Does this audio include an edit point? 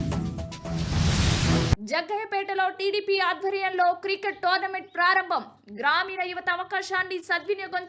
yes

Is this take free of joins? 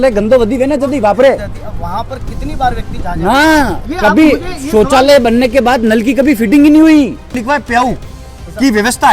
no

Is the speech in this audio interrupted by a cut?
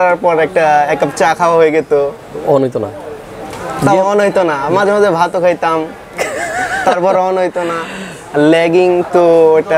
no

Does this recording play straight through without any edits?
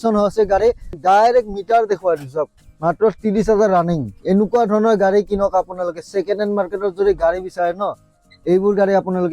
no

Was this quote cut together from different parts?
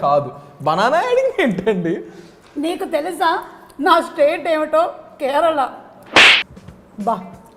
yes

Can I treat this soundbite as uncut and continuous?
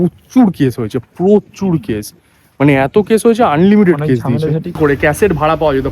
no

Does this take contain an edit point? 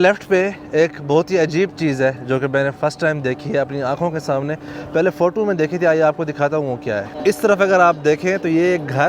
no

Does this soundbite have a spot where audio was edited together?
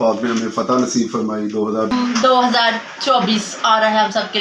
yes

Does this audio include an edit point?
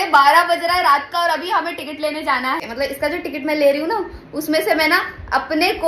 yes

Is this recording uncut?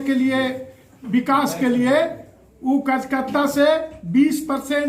yes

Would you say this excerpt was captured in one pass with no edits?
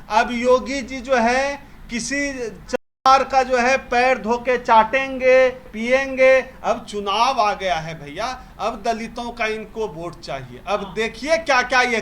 yes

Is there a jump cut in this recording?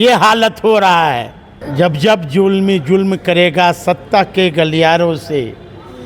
yes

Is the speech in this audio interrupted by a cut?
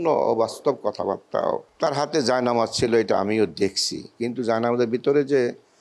yes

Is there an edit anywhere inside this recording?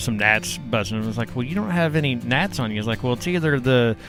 no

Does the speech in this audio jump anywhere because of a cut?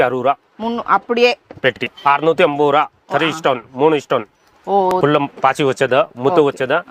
yes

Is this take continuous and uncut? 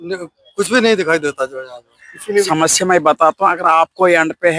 no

